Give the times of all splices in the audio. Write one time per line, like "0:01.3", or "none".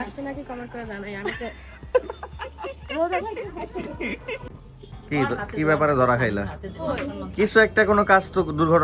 0:04.4